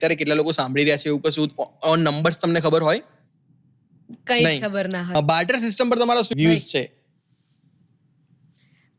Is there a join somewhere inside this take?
yes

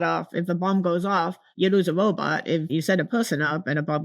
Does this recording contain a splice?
yes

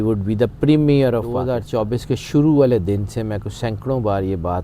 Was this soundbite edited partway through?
yes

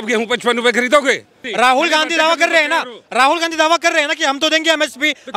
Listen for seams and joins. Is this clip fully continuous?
no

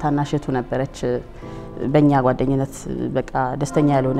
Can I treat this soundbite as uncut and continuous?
yes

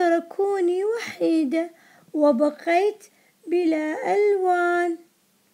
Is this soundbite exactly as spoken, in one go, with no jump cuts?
yes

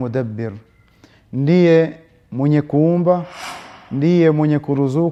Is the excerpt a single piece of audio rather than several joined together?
yes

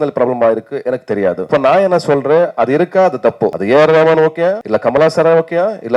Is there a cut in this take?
yes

